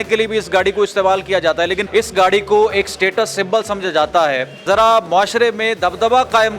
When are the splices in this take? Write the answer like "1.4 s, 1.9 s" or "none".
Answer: 1.8 s, 4.6 s